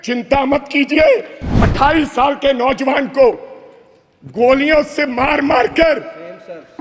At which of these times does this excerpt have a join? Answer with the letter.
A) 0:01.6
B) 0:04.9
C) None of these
A